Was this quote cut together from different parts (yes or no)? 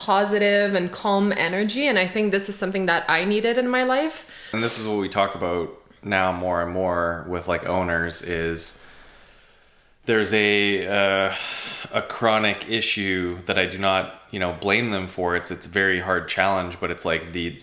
yes